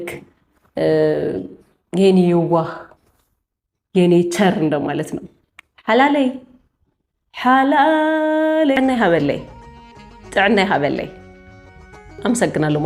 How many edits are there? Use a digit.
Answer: 1